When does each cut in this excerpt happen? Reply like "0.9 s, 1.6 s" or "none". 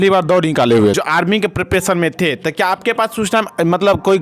0.9 s